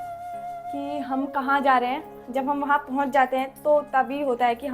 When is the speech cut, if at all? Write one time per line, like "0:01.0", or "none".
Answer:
none